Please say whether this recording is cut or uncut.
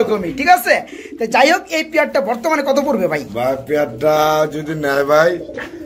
uncut